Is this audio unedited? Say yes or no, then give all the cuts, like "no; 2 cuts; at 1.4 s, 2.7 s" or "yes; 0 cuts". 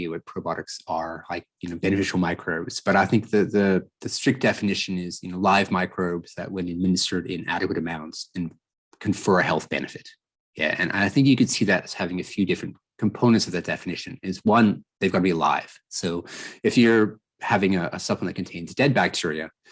yes; 0 cuts